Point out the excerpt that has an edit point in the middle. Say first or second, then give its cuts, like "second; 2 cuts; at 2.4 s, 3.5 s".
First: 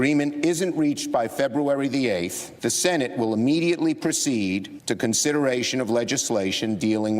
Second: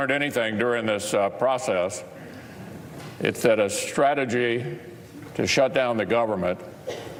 first; 2 cuts; at 2.4 s, 4.7 s